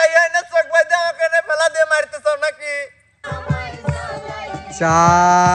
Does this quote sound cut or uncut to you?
cut